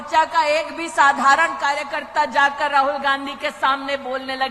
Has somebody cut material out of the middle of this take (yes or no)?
no